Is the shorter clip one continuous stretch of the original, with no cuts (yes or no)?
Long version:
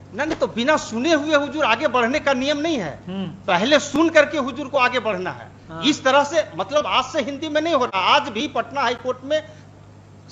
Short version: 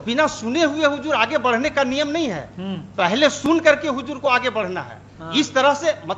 yes